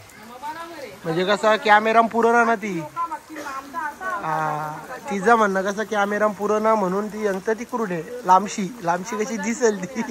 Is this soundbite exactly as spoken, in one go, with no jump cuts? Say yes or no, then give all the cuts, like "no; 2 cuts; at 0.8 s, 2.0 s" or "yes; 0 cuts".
yes; 0 cuts